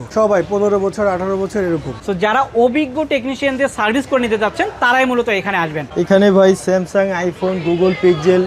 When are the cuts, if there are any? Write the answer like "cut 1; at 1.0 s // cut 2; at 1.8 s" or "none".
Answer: cut 1; at 2.0 s // cut 2; at 5.8 s